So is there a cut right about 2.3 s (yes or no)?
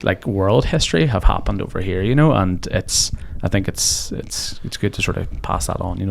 no